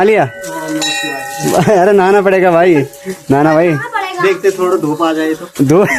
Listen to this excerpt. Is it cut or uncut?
uncut